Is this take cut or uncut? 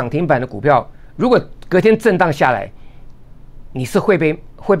uncut